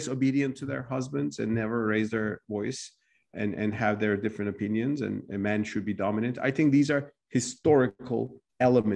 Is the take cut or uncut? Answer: uncut